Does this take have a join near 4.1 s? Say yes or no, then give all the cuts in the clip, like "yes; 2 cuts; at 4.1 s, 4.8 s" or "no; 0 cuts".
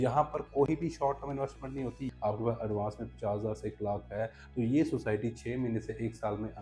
no; 1 cut; at 2.1 s